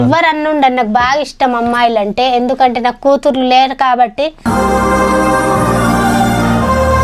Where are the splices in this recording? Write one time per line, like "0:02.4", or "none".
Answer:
0:04.3